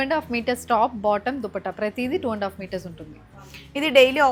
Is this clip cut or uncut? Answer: uncut